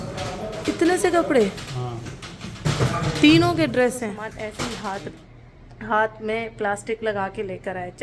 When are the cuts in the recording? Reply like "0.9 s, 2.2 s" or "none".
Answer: 4.4 s